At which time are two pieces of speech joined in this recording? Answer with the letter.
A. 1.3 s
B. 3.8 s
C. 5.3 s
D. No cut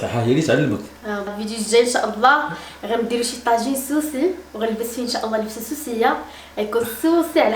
A